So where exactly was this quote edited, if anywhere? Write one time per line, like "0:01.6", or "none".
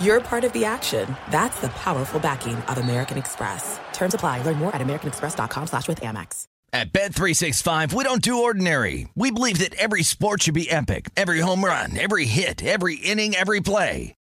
0:06.6

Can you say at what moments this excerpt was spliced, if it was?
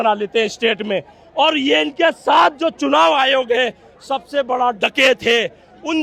none

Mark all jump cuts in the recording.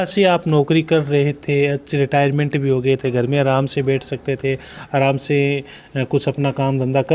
none

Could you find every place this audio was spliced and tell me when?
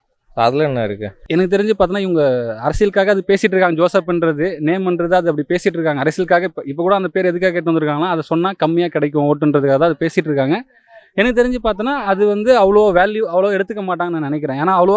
0:01.1

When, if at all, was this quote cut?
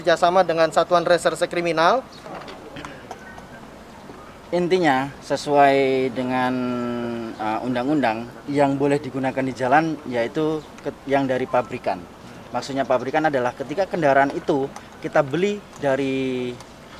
0:02.2

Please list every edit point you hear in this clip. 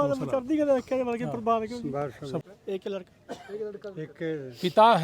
0:02.5

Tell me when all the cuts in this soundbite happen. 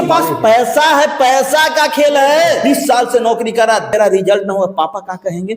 0:02.6
0:03.9

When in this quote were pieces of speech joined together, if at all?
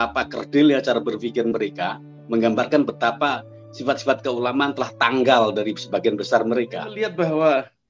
0:07.0

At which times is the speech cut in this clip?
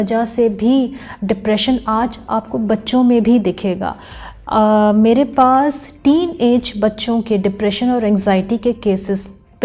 none

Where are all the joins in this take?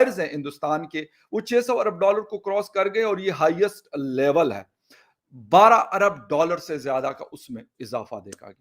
0:04.9

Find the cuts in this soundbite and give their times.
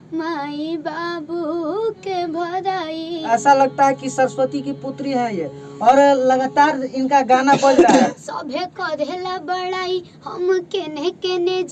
0:03.2
0:08.3

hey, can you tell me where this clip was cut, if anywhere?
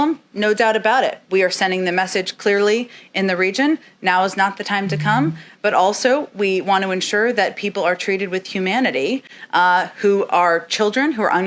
none

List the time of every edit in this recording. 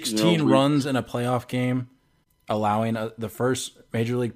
none

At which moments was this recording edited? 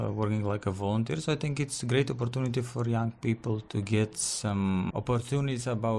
0:03.6
0:04.9

